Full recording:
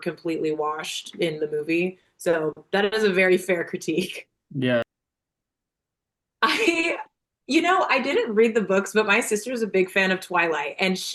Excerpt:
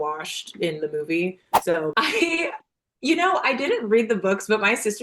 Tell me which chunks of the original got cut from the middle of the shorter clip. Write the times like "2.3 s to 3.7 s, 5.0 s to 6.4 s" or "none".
2.5 s to 6.4 s